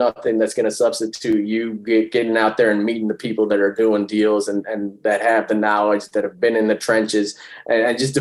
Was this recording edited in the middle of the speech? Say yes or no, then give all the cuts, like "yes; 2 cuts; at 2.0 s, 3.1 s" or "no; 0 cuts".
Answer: no; 0 cuts